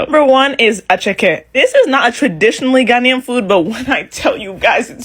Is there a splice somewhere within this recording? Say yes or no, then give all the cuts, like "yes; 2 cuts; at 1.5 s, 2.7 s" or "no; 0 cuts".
no; 0 cuts